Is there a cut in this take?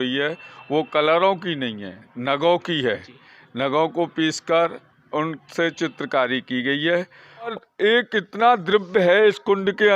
yes; 1 cut; at 7.5 s

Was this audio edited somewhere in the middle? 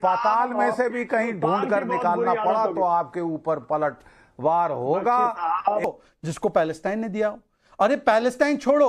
yes; 1 cut; at 5.8 s

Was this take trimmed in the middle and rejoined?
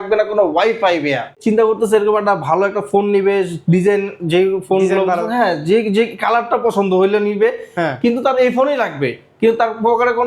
yes; 1 cut; at 1.3 s

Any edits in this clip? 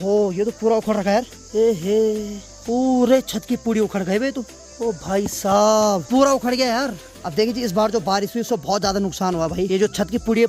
no; 0 cuts

